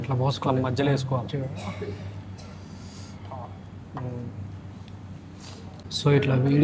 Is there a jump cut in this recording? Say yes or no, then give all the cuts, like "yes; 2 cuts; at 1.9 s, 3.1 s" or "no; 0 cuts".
no; 0 cuts